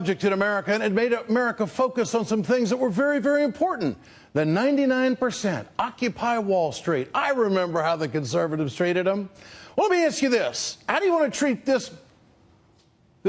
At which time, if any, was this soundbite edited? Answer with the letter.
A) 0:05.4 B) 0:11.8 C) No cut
C